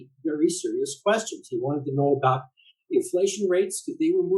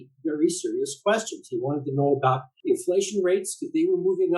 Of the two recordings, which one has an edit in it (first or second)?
second